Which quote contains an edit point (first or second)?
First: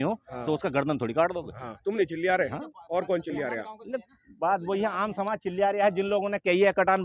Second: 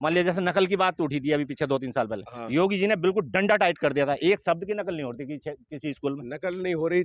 first